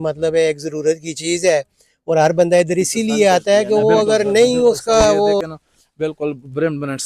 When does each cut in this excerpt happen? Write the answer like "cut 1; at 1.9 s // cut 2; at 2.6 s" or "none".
cut 1; at 5.4 s